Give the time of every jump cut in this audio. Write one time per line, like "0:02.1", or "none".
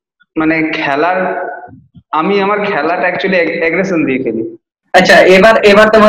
0:04.6